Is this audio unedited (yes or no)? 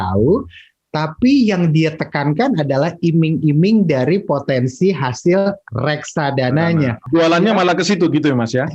no